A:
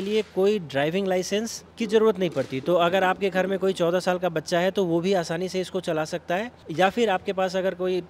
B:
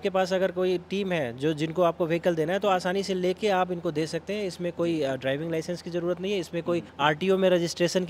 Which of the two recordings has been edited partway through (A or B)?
B